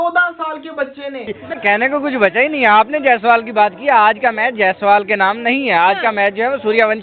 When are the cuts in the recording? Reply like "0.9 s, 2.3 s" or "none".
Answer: 1.6 s